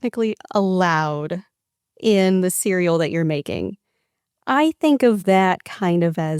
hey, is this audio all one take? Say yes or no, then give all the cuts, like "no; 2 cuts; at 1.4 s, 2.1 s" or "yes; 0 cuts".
yes; 0 cuts